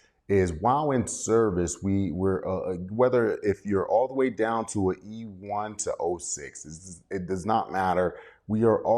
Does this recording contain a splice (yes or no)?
no